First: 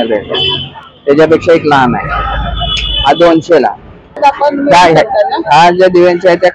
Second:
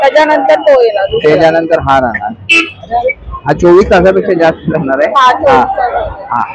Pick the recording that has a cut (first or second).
first